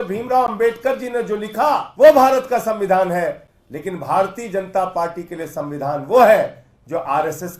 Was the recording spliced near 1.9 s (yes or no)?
yes